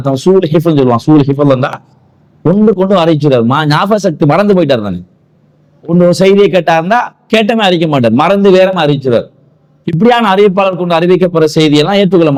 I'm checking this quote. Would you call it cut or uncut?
uncut